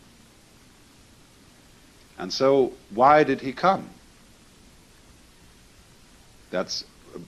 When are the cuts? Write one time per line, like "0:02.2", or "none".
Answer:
0:02.8